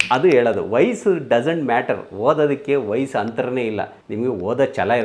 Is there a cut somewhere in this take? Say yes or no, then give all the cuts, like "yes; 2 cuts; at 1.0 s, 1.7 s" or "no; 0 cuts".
no; 0 cuts